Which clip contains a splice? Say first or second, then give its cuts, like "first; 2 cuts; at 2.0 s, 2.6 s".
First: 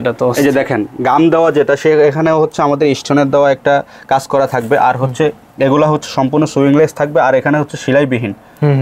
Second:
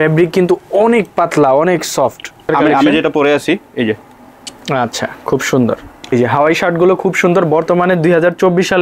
second; 2 cuts; at 2.4 s, 6.1 s